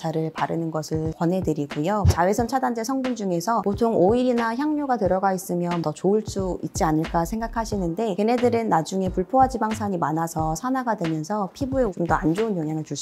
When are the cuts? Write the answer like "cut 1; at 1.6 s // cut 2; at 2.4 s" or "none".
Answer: cut 1; at 2.1 s // cut 2; at 3.6 s // cut 3; at 5.8 s

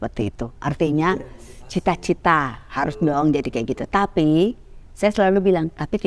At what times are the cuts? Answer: none

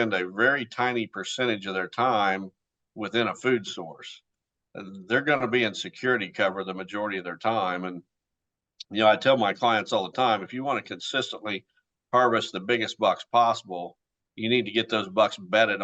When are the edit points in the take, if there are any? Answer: none

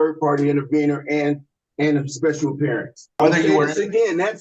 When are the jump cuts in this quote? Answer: cut 1; at 3.2 s

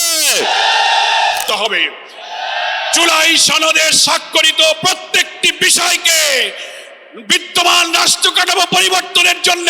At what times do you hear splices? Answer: cut 1; at 1.4 s

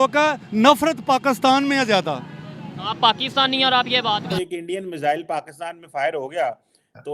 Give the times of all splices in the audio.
cut 1; at 4.3 s

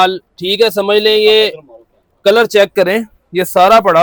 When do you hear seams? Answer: none

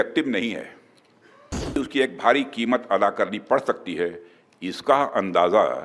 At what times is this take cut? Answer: cut 1; at 1.8 s

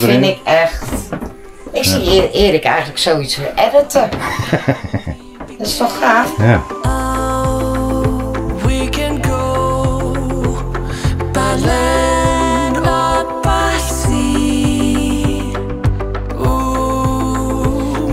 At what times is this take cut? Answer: cut 1; at 7.0 s

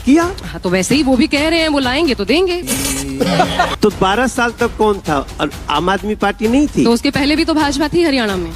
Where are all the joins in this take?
cut 1; at 3.7 s

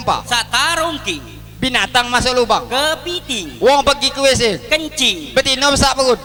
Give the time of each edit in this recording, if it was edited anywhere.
none

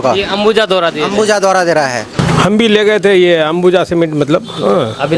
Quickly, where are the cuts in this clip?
cut 1; at 2.2 s

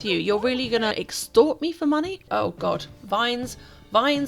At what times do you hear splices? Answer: cut 1; at 0.9 s // cut 2; at 2.2 s

